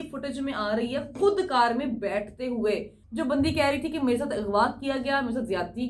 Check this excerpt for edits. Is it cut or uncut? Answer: cut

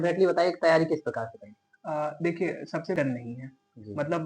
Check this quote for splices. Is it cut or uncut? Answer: cut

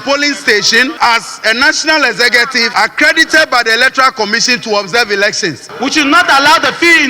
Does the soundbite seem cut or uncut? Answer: cut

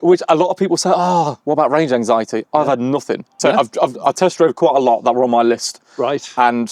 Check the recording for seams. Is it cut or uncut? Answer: cut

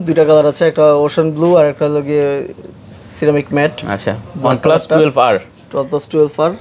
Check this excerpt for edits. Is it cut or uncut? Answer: uncut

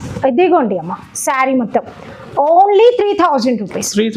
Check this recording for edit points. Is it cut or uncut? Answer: uncut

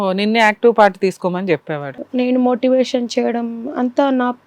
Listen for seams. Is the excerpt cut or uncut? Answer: cut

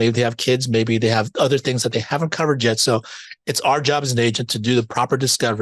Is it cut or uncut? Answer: uncut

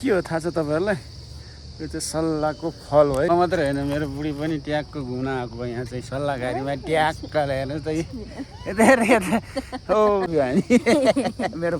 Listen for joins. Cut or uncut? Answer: cut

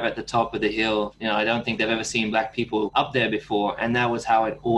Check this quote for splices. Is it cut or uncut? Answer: cut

